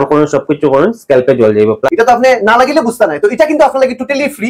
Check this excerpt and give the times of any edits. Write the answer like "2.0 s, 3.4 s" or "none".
1.9 s